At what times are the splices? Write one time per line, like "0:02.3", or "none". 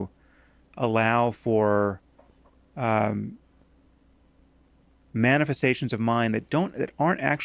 0:06.5